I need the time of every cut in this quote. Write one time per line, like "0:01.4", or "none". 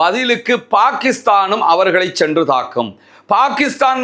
none

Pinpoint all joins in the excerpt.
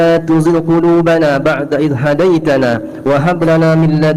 none

